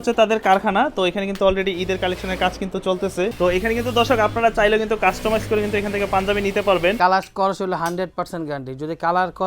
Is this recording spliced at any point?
yes; 2 cuts; at 3.3 s, 7.0 s

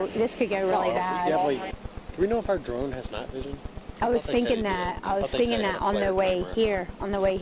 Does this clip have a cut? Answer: yes; 1 cut; at 1.7 s

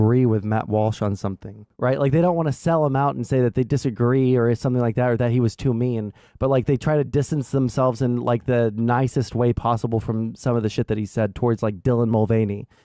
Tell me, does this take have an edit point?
yes; 1 cut; at 1.7 s

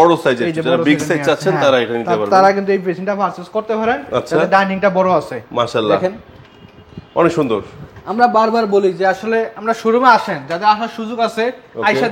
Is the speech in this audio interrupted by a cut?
no; 0 cuts

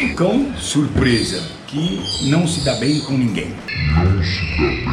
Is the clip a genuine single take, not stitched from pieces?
yes; 0 cuts

